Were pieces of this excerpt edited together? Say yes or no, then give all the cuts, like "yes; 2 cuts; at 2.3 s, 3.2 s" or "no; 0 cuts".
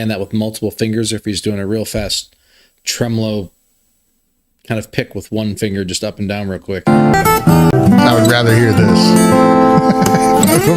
yes; 1 cut; at 7.7 s